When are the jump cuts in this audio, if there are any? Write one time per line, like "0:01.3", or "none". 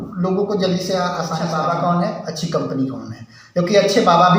0:01.5

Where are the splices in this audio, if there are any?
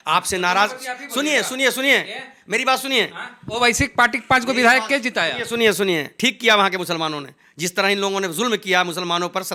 none

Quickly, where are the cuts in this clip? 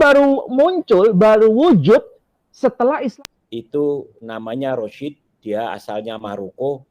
0:03.1

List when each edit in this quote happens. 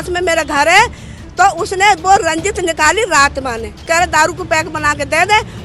0:03.8

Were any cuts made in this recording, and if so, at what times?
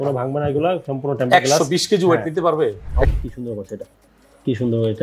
0:03.1

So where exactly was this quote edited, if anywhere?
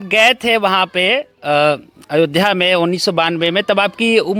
none

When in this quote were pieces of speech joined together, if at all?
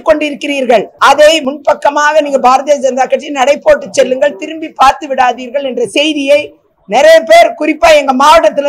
0:00.9
0:01.4

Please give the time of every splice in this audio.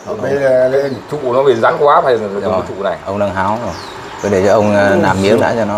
none

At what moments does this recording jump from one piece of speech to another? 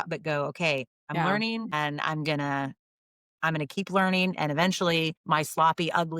0:00.9
0:05.2

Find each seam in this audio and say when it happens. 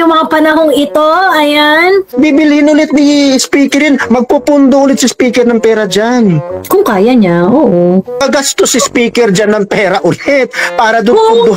0:02.1
0:06.5
0:08.2

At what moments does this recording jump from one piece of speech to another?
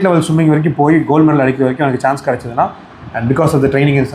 none

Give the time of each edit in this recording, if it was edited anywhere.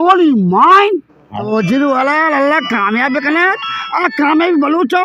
0:01.4

